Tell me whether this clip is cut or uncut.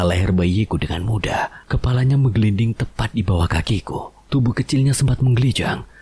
cut